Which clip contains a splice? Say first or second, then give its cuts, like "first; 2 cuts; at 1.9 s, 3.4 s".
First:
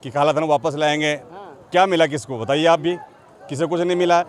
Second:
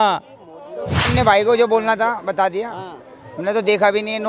second; 1 cut; at 1.1 s